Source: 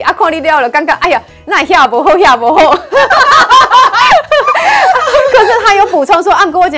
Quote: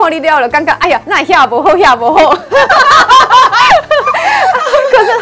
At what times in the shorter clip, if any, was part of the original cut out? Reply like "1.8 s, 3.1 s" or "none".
1.1 s